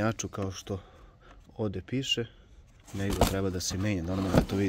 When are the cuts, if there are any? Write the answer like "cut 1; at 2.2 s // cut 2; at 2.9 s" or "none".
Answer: none